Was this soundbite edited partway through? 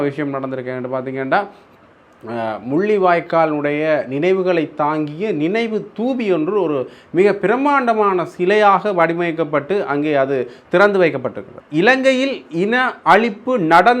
yes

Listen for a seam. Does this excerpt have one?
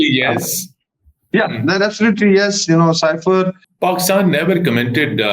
yes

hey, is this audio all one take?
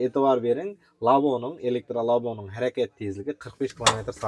yes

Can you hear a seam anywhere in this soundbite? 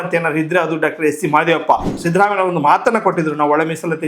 yes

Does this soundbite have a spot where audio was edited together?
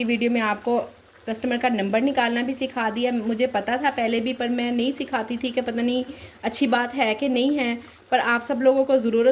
no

